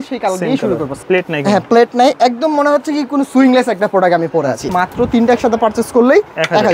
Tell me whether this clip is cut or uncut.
cut